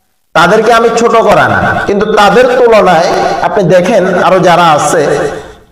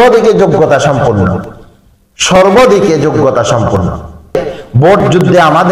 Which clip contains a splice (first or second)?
second